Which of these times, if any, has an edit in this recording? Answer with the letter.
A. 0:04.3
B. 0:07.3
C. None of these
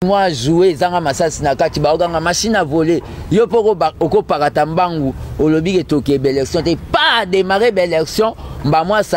C